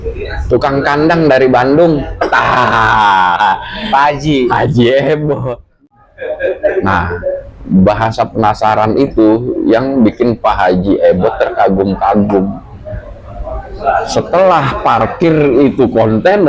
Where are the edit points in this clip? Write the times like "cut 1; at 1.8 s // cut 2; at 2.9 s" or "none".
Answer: cut 1; at 5.7 s